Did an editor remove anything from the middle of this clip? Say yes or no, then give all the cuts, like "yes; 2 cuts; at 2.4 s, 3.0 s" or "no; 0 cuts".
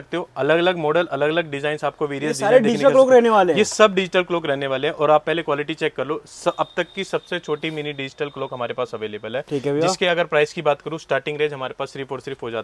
no; 0 cuts